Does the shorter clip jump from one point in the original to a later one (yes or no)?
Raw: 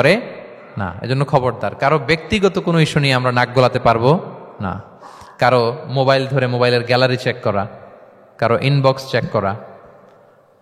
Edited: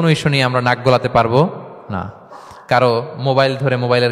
no